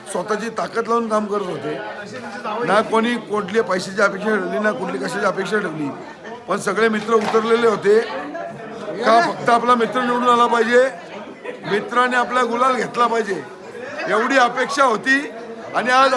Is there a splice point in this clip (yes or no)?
no